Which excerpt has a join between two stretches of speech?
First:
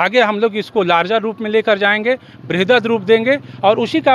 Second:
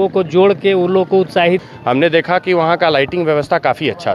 second; 1 cut; at 1.7 s

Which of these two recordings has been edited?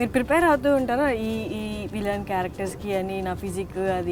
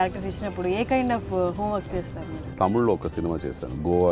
second; 1 cut; at 2.5 s

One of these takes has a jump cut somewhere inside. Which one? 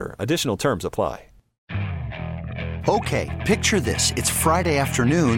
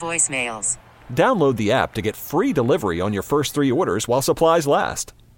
first; 1 cut; at 1.6 s

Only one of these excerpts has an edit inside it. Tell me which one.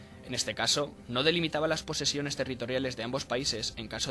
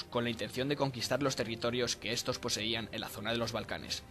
first; 1 cut; at 2.6 s

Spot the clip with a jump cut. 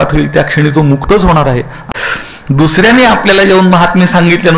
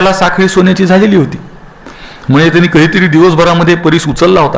first; 1 cut; at 1.8 s

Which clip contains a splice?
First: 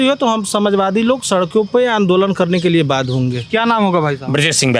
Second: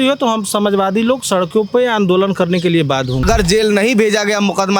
second; 1 cut; at 3.2 s

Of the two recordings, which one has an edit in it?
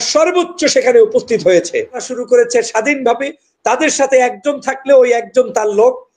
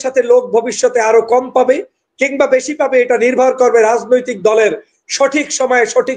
first; 1 cut; at 2.1 s

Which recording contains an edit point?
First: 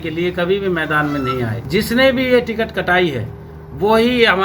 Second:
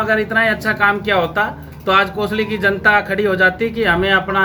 first; 1 cut; at 1.6 s

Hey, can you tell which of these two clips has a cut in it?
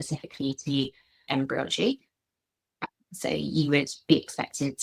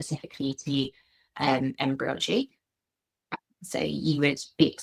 first; 1 cut; at 1.3 s

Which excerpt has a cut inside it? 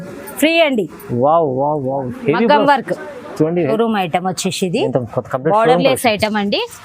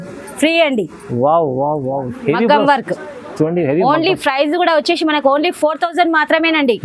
first; 1 cut; at 3.7 s

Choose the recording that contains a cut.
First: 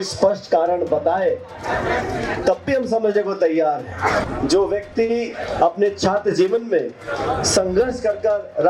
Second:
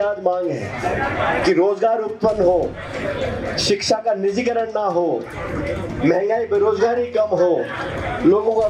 first; 1 cut; at 4.3 s

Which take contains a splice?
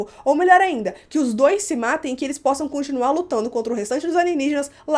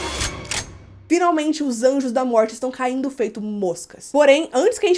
second; 1 cut; at 3.9 s

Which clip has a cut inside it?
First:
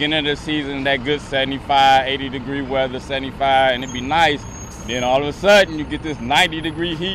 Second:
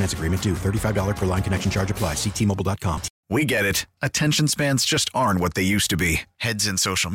second; 1 cut; at 3.1 s

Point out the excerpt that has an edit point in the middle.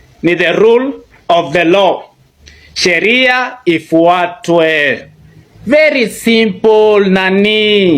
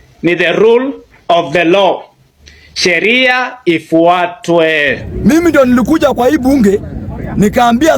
second; 1 cut; at 5.0 s

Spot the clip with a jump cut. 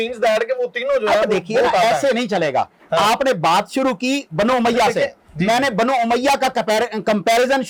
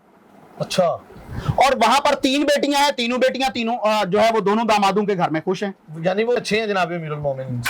second; 1 cut; at 6.4 s

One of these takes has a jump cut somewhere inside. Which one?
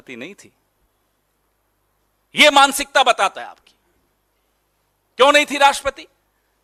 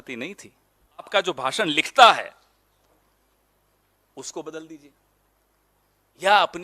second; 1 cut; at 1.1 s

